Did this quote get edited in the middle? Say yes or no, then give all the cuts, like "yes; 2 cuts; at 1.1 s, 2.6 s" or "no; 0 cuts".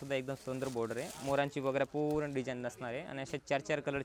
no; 0 cuts